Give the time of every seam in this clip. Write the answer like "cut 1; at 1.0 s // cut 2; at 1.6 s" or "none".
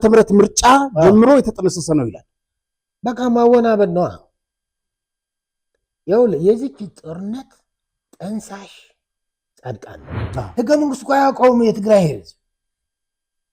cut 1; at 10.1 s